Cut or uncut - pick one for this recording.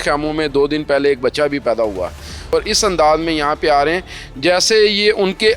cut